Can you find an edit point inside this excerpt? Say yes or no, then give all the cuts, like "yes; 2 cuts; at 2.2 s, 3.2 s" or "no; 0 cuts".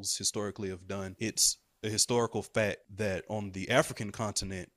yes; 2 cuts; at 1.1 s, 2.9 s